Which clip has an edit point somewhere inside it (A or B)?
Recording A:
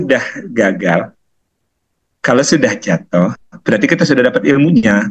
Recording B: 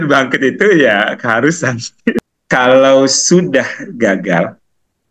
B